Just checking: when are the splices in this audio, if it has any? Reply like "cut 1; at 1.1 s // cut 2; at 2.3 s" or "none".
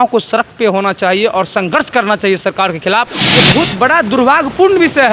cut 1; at 3.2 s